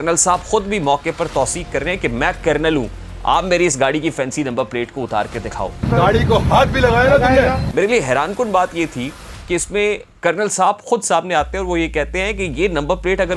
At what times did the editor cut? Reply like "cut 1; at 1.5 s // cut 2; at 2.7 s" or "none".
none

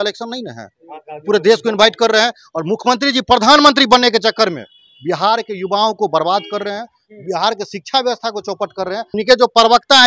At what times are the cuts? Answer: cut 1; at 9.1 s

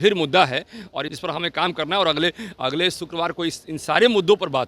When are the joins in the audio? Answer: cut 1; at 1.1 s

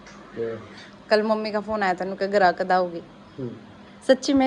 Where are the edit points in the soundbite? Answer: none

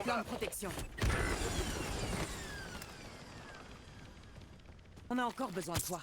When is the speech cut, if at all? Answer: cut 1; at 5.1 s

